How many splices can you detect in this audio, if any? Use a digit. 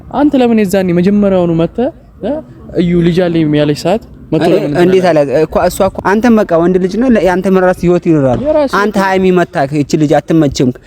1